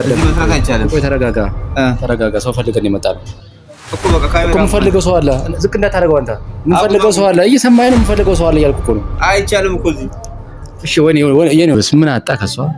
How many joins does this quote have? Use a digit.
1